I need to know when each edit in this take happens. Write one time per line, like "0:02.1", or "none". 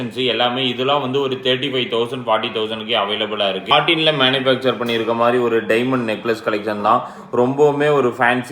0:03.7

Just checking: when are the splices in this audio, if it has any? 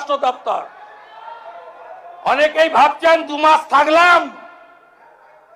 none

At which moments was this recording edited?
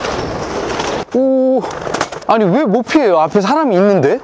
0:01.0
0:02.1

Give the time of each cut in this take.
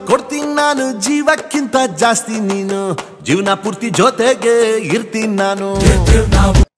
none

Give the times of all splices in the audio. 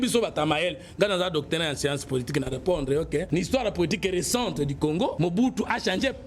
0:03.3
0:05.1

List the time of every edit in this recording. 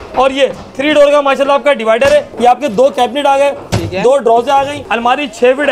0:02.3
0:04.8

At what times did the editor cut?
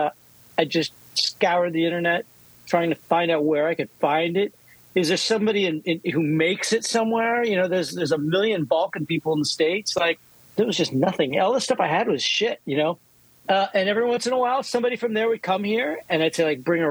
0:10.3

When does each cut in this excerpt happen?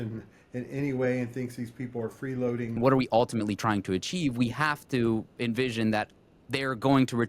0:02.8

